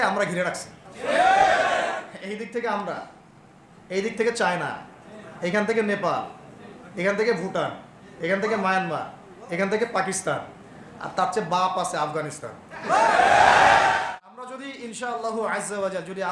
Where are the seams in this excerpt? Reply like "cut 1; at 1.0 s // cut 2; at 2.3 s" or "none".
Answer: cut 1; at 14.0 s